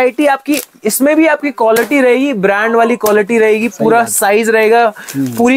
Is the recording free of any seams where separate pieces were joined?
yes; 0 cuts

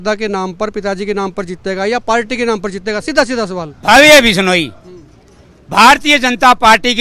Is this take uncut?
yes; 0 cuts

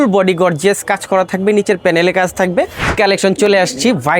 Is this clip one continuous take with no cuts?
no; 1 cut; at 2.9 s

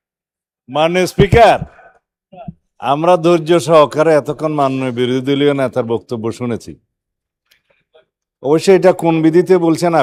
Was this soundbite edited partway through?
no; 0 cuts

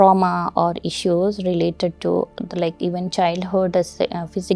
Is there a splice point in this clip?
no; 0 cuts

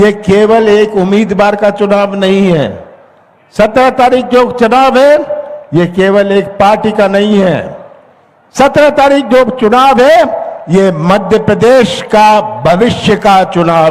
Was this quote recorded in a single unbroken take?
yes; 0 cuts

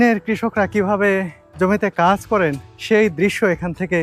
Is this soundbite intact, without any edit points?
no; 2 cuts; at 1.4 s, 2.7 s

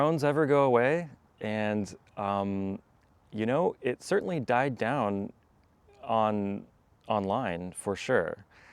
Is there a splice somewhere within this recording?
no; 0 cuts

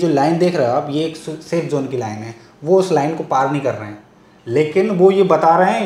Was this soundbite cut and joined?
no; 0 cuts

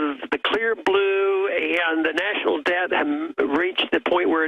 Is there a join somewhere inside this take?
yes; 1 cut; at 3.6 s

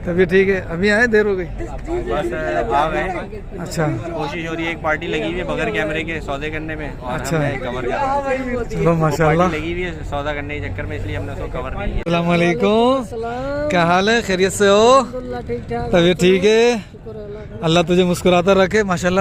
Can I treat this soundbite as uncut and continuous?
no; 1 cut; at 12.0 s

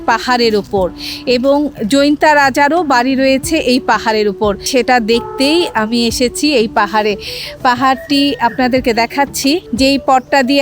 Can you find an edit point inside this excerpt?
no; 0 cuts

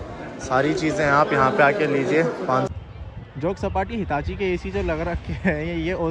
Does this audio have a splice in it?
yes; 1 cut; at 2.7 s

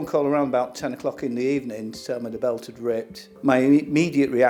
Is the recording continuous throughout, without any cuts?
yes; 0 cuts

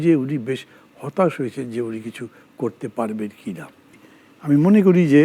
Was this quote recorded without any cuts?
no; 1 cut; at 4.0 s

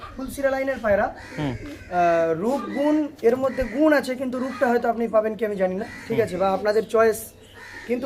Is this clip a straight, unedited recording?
yes; 0 cuts

